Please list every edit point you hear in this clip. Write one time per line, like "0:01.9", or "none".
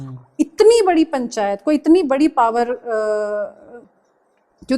0:03.7